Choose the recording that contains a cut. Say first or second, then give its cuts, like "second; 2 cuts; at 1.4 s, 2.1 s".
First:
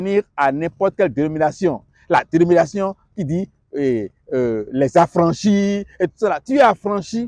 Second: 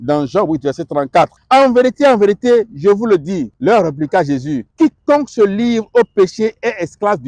second; 3 cuts; at 1.4 s, 3.5 s, 4.6 s